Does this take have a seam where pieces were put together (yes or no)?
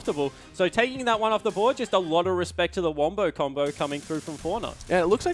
yes